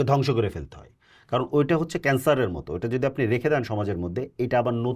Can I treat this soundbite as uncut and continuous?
yes; 0 cuts

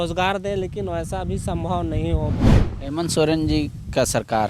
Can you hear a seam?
yes; 1 cut; at 2.3 s

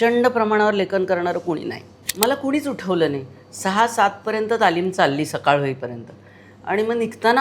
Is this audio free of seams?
no; 1 cut; at 2.0 s

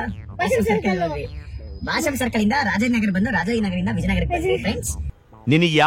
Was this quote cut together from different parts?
no; 0 cuts

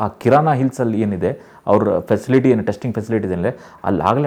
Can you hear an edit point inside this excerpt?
no; 0 cuts

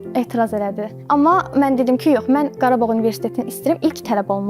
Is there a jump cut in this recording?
yes; 1 cut; at 0.9 s

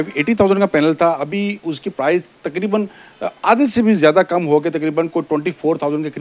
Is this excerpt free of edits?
yes; 0 cuts

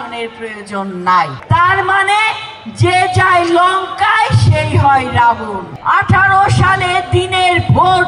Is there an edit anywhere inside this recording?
yes; 2 cuts; at 1.4 s, 5.7 s

